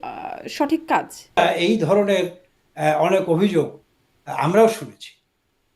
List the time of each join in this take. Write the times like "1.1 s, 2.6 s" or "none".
1.4 s